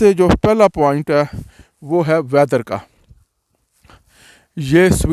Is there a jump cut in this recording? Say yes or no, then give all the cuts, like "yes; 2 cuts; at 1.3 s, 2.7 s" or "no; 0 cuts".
no; 0 cuts